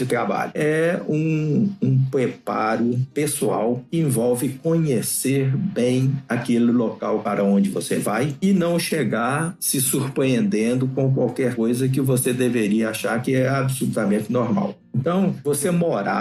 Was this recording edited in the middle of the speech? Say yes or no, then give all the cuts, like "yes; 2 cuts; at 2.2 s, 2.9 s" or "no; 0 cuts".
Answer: no; 0 cuts